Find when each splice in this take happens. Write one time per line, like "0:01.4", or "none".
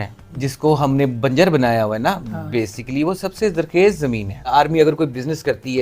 0:04.5

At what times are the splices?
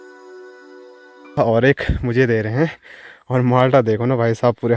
0:01.3

